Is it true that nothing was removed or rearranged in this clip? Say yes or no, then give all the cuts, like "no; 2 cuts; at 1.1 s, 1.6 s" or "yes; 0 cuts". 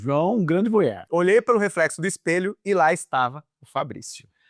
no; 1 cut; at 1.0 s